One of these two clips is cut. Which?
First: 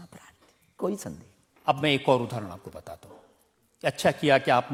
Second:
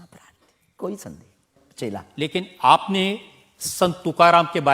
second; 1 cut; at 1.6 s

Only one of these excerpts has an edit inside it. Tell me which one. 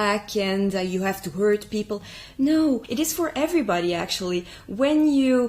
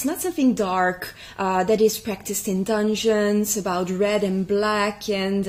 first; 1 cut; at 2.9 s

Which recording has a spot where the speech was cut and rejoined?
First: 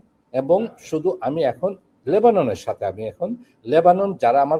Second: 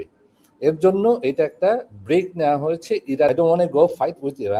second; 1 cut; at 3.3 s

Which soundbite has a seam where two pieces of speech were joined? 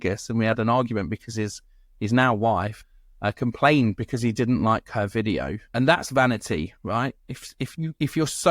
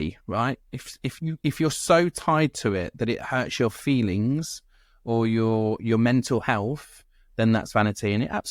first; 2 cuts; at 2.8 s, 5.6 s

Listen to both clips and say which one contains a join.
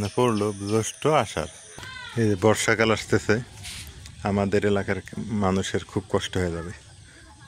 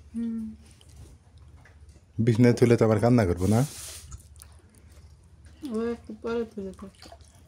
first; 1 cut; at 1.6 s

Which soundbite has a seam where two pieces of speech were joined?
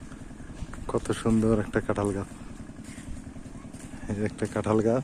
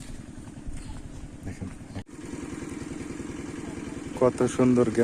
second; 1 cut; at 2.0 s

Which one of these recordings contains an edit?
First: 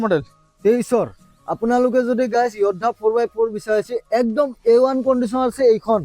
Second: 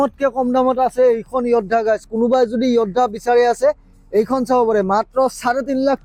first; 1 cut; at 1.2 s

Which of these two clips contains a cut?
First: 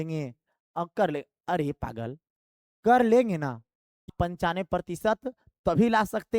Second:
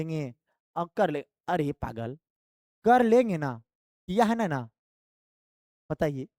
first; 1 cut; at 4.1 s

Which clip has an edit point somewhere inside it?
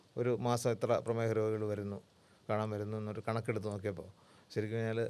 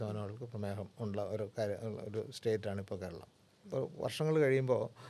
second; 1 cut; at 3.6 s

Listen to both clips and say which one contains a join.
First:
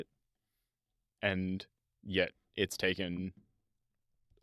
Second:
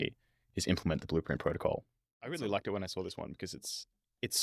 second; 1 cut; at 2.2 s

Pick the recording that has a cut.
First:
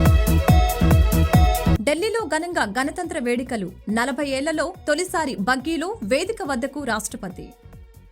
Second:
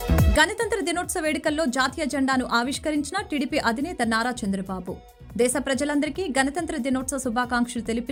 first; 1 cut; at 1.6 s

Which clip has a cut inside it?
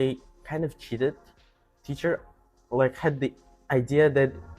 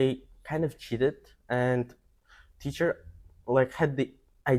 first; 1 cut; at 1.3 s

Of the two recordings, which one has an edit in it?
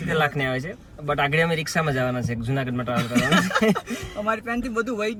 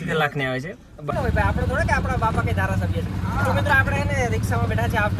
second; 1 cut; at 1.1 s

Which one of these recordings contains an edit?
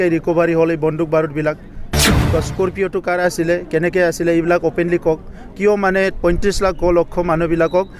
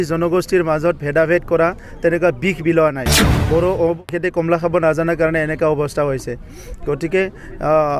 second; 1 cut; at 4.0 s

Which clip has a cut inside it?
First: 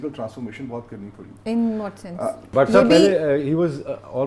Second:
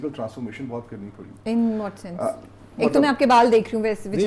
first; 1 cut; at 2.5 s

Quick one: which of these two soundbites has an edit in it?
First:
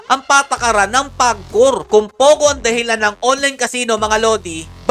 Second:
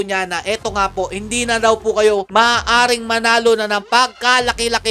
first; 1 cut; at 1.8 s

